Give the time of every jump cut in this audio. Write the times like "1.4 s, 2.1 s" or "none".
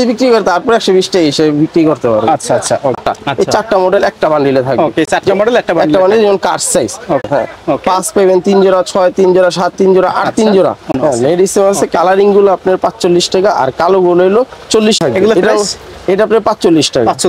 3.0 s, 7.2 s, 10.9 s, 15.0 s